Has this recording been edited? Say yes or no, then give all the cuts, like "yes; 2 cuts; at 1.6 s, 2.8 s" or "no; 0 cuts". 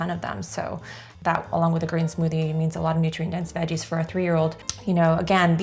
yes; 2 cuts; at 1.1 s, 4.7 s